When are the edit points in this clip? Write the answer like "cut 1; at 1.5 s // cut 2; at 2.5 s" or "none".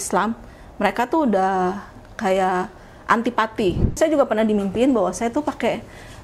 cut 1; at 4.0 s